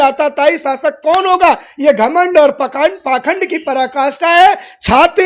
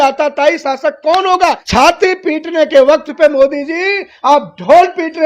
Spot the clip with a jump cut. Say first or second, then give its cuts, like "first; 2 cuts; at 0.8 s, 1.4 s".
second; 1 cut; at 1.6 s